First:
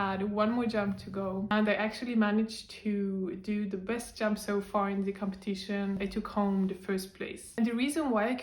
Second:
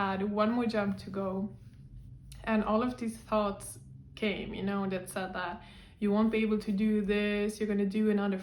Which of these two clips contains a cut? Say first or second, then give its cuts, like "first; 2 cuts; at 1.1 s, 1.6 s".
first; 2 cuts; at 1.5 s, 6.0 s